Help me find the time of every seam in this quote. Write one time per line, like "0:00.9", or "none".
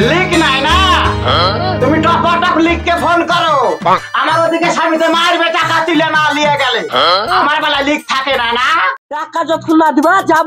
0:09.1